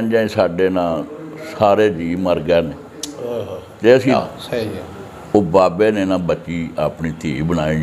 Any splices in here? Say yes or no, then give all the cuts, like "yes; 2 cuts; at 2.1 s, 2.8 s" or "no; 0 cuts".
yes; 1 cut; at 4.2 s